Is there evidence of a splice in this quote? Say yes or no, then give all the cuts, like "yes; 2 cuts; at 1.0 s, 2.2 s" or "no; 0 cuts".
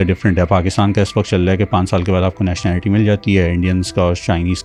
no; 0 cuts